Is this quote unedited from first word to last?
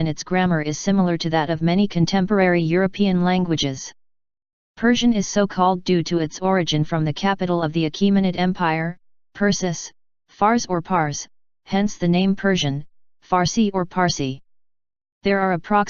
no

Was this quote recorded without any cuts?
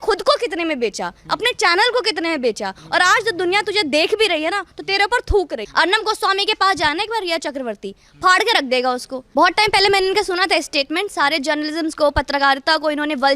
no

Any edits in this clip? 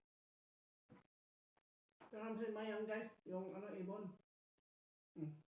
no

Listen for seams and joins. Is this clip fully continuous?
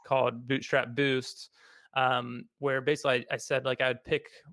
yes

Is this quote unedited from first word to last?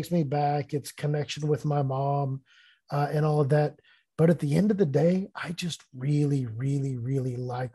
yes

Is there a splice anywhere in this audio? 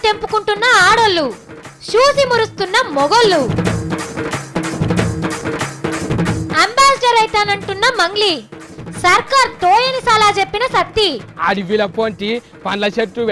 yes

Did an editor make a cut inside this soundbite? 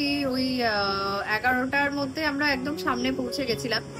no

